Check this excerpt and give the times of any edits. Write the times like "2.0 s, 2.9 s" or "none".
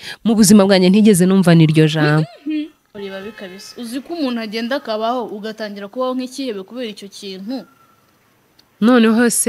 3.0 s